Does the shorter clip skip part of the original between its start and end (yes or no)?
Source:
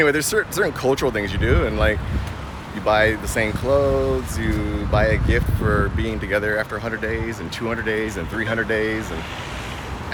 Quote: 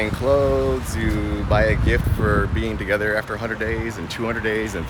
no